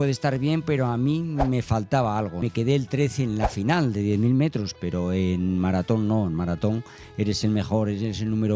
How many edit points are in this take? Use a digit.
2